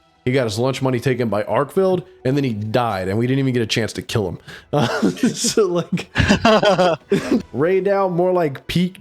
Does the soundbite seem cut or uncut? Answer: cut